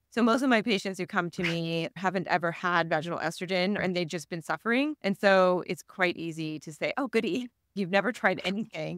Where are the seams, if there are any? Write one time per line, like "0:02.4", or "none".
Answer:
0:02.0
0:03.8
0:05.0